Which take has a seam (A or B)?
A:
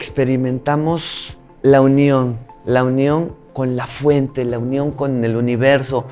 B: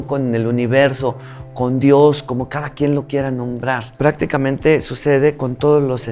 B